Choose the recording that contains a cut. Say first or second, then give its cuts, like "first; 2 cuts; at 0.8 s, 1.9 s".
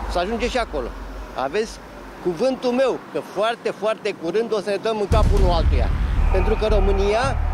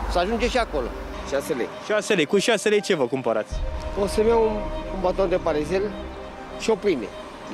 second; 2 cuts; at 1.2 s, 3.8 s